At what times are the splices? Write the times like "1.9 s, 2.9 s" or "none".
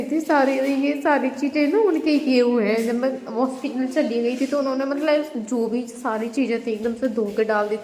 none

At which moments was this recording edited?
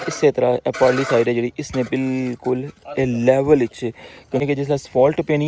4.4 s

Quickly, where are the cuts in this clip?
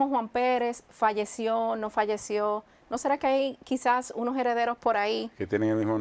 none

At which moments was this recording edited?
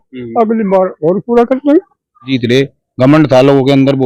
2.3 s

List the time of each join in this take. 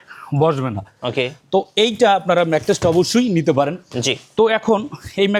none

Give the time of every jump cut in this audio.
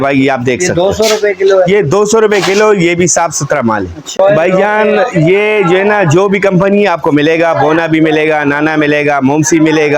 4.2 s

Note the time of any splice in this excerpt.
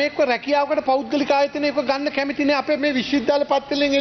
none

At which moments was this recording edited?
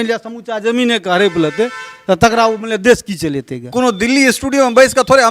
3.6 s

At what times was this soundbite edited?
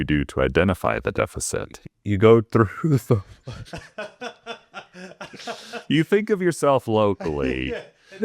1.1 s

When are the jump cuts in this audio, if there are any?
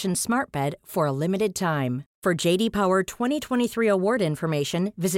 none

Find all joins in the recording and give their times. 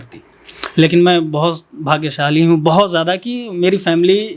none

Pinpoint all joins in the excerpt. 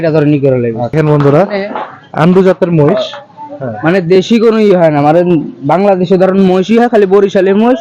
0.9 s

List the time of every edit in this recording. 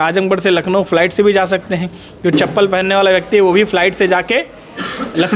none

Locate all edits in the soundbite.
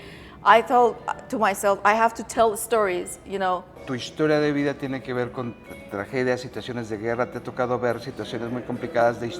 3.7 s

